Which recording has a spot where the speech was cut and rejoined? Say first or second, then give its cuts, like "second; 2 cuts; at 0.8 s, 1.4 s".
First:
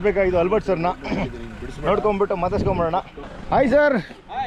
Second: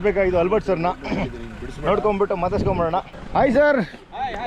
second; 1 cut; at 3.2 s